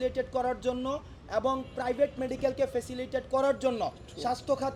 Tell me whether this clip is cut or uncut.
uncut